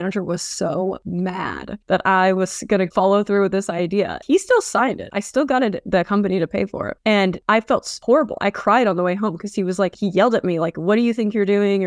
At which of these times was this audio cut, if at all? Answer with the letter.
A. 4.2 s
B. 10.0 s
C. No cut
A